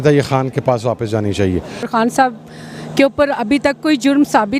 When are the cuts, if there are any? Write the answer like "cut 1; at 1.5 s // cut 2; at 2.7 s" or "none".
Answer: cut 1; at 1.9 s

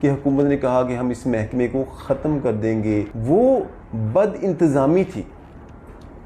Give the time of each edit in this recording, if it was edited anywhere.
cut 1; at 3.1 s

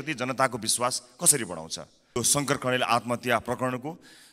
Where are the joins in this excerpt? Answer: cut 1; at 2.2 s

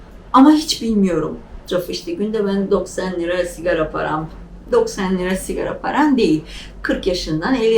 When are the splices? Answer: cut 1; at 1.6 s

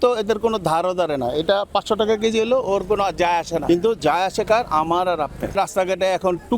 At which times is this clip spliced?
cut 1; at 3.6 s // cut 2; at 5.5 s

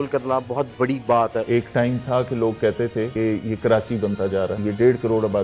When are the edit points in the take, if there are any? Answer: cut 1; at 1.4 s // cut 2; at 3.1 s // cut 3; at 4.6 s

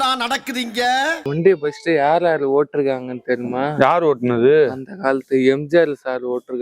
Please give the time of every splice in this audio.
cut 1; at 1.2 s

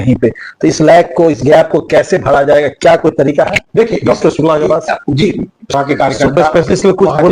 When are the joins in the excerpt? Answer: cut 1; at 5.7 s

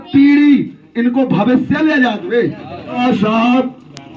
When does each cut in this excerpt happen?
cut 1; at 3.0 s

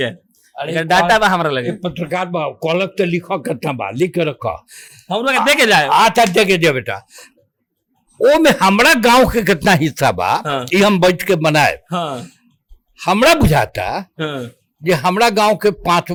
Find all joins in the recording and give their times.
none

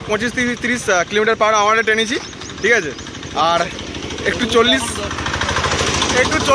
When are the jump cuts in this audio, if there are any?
none

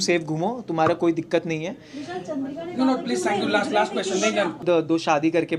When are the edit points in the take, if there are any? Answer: cut 1; at 4.6 s

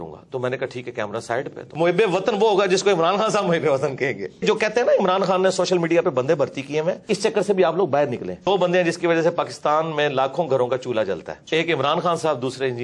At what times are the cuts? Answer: cut 1; at 1.6 s // cut 2; at 4.4 s // cut 3; at 7.0 s // cut 4; at 8.4 s // cut 5; at 11.3 s

